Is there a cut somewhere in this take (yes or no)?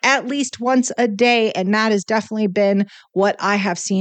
no